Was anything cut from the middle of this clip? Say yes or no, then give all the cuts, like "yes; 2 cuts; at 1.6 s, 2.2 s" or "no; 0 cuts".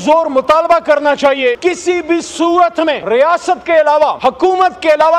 yes; 3 cuts; at 1.6 s, 3.0 s, 4.2 s